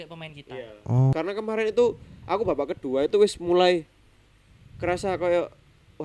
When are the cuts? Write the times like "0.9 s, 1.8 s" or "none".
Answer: 1.1 s

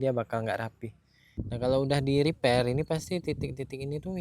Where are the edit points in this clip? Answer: 1.5 s

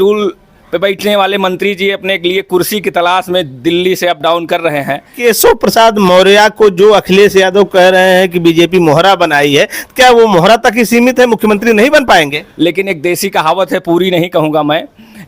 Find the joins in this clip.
5.1 s, 12.4 s

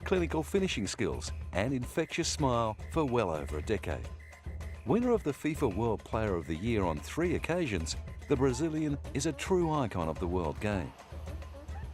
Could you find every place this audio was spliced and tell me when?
2.4 s

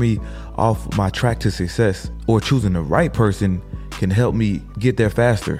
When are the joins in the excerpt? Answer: 2.1 s, 4.7 s

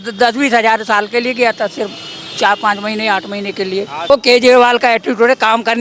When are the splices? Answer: 4.1 s

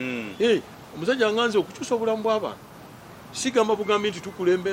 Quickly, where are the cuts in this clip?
none

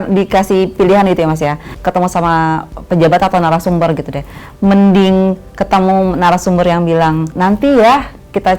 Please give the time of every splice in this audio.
1.7 s, 7.3 s

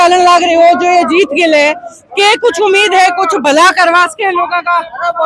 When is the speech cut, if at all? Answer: none

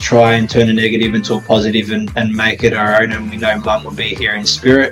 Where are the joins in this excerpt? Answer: none

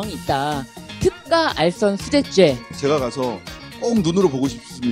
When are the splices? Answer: 2.7 s

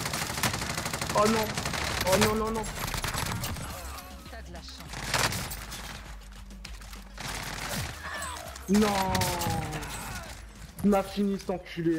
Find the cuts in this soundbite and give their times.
9.3 s

